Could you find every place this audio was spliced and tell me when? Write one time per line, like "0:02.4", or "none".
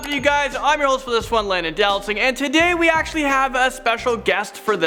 none